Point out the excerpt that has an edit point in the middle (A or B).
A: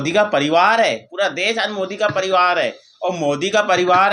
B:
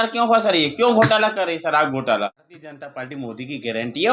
B